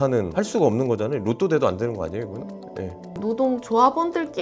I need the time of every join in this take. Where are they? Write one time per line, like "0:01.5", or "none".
0:03.2